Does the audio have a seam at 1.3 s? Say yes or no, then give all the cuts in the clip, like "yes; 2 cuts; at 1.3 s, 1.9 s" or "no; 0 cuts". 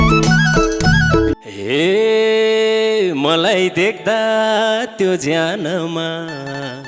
yes; 1 cut; at 1.3 s